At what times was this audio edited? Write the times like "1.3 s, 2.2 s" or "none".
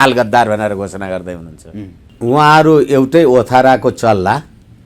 2.0 s